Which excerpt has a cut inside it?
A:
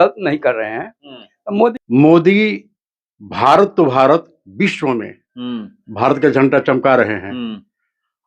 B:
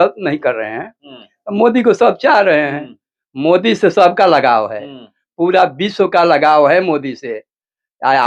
A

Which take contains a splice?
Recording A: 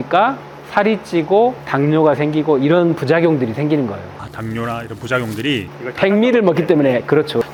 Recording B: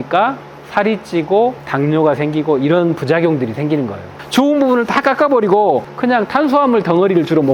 B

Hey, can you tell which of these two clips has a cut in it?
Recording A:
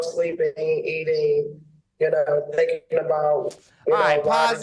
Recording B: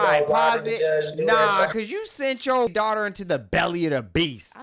B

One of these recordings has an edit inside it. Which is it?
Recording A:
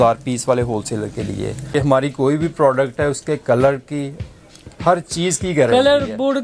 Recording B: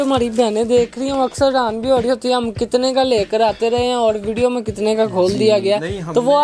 A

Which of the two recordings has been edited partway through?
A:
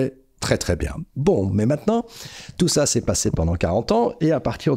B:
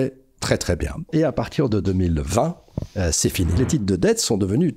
B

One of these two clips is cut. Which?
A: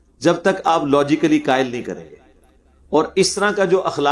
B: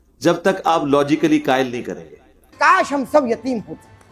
B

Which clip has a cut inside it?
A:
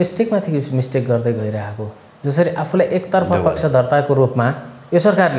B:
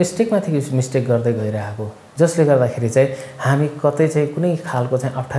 B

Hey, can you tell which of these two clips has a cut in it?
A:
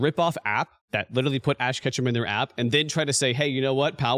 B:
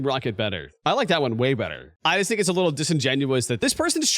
B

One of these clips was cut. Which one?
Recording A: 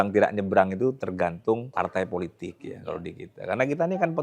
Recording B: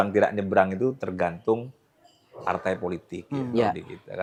A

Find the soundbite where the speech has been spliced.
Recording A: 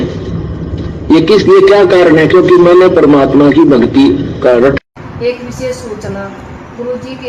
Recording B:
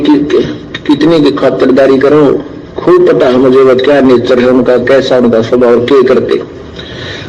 A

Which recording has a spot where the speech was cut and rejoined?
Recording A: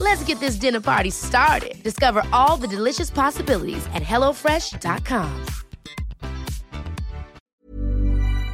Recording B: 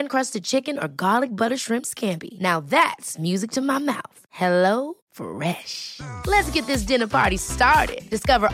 A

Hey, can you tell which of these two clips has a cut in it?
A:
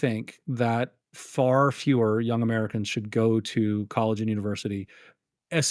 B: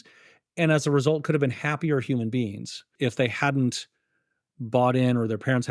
B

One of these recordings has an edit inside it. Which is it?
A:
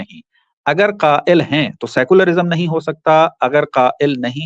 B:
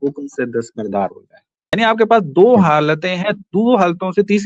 B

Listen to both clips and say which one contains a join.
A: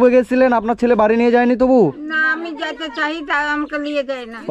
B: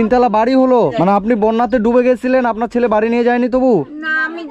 B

